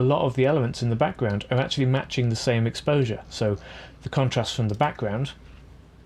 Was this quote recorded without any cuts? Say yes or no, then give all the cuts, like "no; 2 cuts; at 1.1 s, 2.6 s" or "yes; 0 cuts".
yes; 0 cuts